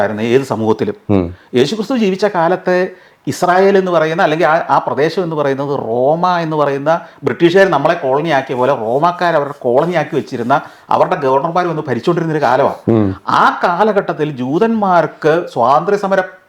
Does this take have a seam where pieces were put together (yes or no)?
no